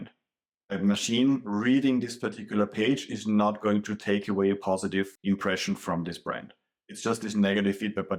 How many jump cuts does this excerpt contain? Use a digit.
0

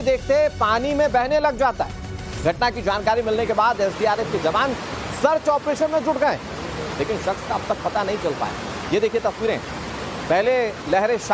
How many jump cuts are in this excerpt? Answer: 1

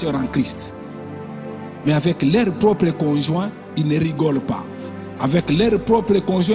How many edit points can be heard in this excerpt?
0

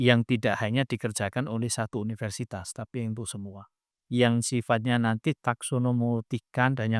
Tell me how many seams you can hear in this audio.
1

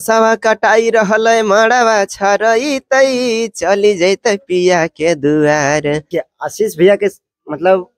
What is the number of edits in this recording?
1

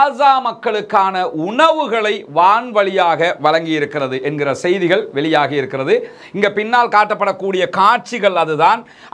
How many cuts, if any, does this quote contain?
0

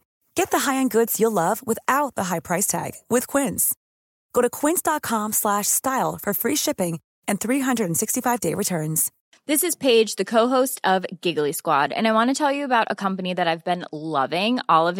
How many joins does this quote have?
1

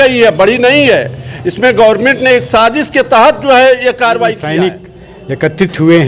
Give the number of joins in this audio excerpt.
1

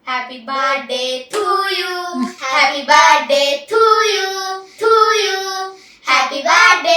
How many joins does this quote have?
1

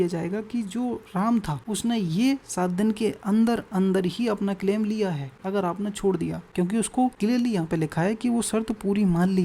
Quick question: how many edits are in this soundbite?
4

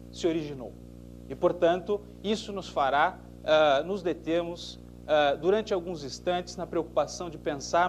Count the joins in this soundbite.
1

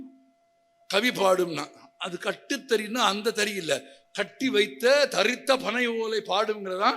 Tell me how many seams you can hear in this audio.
1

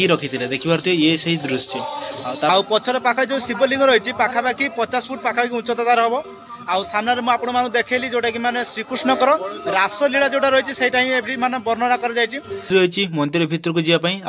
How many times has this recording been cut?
2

